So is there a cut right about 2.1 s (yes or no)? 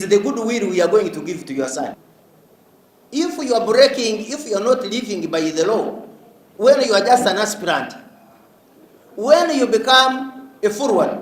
yes